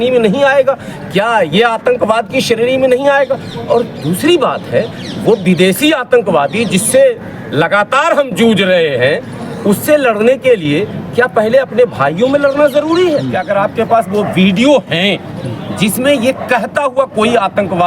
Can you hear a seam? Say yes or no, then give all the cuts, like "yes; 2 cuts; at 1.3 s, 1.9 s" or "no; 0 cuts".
yes; 1 cut; at 13.3 s